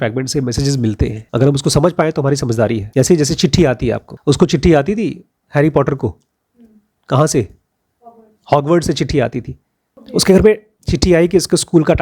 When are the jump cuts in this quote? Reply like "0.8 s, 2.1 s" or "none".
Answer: 1.2 s, 2.8 s, 4.1 s